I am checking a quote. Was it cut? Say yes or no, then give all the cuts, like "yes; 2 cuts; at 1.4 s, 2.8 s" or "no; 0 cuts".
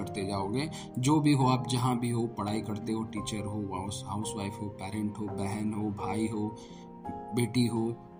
no; 0 cuts